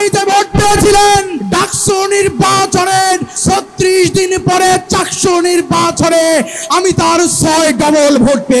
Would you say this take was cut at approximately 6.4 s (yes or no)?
no